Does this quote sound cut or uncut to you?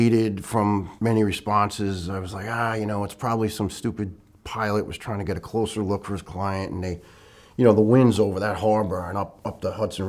cut